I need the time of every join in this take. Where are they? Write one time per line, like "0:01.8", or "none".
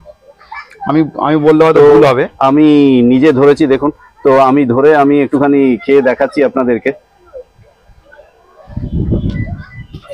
none